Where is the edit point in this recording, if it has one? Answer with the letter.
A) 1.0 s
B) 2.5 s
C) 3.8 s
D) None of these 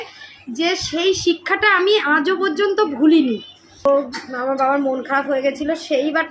C